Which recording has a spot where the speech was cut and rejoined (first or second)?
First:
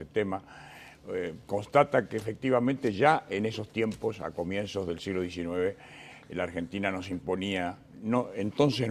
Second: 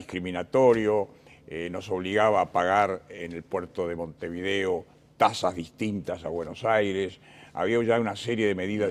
second